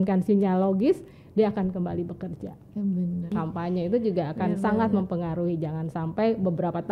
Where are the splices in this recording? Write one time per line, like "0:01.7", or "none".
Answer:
0:03.3